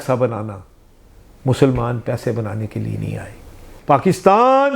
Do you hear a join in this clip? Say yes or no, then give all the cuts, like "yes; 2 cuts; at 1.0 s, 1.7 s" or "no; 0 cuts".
yes; 1 cut; at 3.6 s